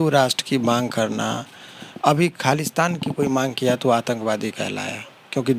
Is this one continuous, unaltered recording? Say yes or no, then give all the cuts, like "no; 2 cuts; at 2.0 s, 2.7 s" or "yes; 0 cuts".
yes; 0 cuts